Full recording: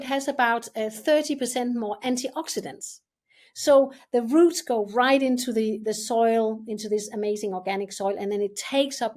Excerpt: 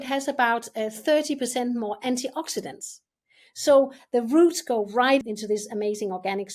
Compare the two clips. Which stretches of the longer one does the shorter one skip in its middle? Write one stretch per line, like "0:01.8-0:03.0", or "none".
0:05.2-0:06.6